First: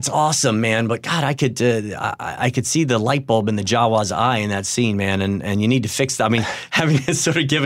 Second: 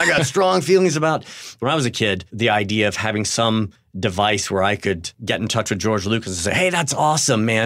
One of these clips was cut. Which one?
second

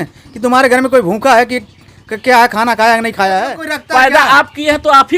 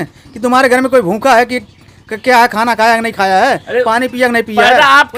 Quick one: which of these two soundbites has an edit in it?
first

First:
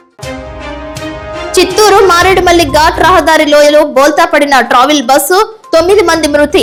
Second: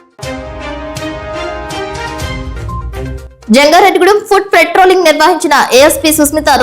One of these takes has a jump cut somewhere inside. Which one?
second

